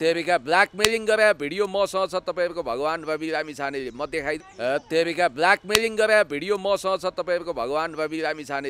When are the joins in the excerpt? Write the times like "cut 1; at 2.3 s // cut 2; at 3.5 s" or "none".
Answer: cut 1; at 4.5 s